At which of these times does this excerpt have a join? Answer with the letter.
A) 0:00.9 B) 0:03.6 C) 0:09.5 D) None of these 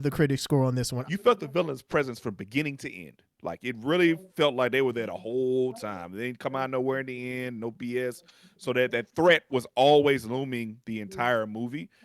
A